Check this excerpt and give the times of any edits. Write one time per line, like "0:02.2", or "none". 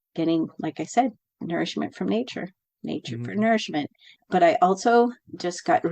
0:04.1